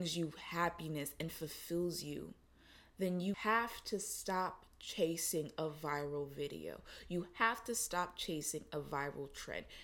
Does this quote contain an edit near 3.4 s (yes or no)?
yes